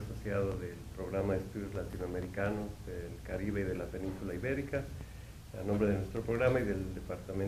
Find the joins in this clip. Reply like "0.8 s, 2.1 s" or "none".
none